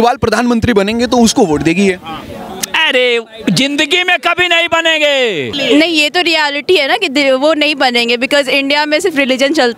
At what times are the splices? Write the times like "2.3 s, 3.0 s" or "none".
5.6 s